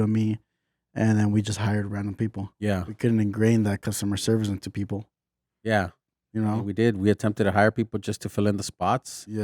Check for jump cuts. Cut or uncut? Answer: cut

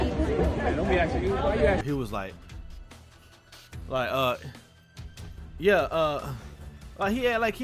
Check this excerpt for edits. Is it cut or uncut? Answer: cut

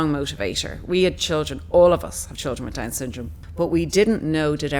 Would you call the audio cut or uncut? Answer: cut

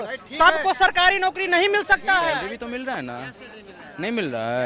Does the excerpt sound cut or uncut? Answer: cut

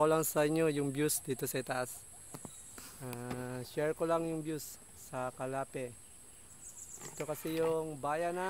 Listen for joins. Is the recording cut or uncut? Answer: uncut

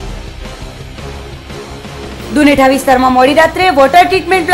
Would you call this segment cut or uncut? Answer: cut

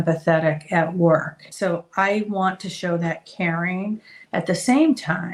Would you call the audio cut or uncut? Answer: cut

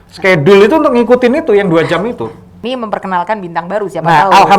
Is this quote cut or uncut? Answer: cut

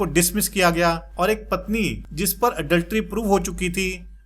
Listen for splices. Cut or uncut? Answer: cut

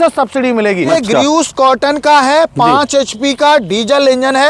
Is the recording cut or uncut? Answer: cut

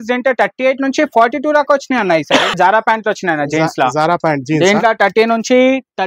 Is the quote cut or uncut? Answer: cut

